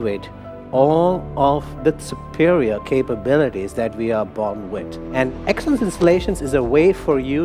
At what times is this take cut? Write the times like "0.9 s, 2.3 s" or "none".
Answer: 5.0 s